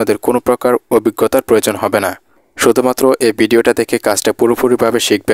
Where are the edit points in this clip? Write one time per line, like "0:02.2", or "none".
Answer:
none